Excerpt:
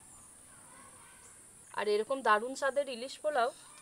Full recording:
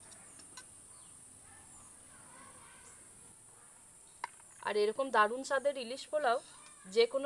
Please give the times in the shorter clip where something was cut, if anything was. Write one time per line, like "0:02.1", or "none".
0:01.6